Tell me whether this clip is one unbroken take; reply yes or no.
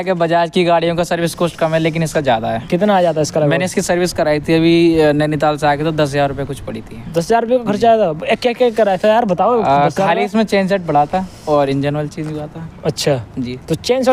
yes